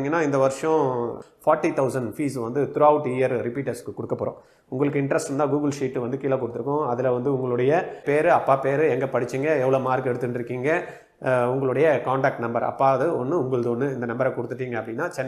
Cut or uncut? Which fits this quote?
cut